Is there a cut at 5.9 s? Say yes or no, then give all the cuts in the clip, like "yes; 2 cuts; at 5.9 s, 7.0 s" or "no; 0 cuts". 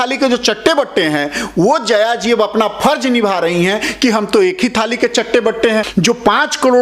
yes; 1 cut; at 5.9 s